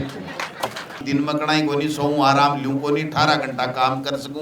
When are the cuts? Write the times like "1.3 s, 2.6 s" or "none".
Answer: 1.0 s

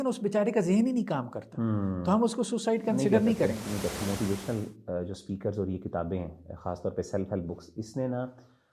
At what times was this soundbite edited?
4.0 s

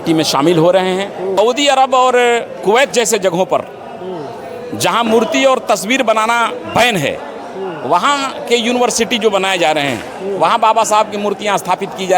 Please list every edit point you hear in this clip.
1.3 s

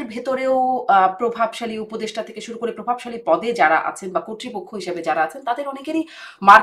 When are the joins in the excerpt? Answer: none

